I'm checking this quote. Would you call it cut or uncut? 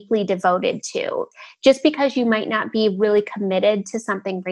cut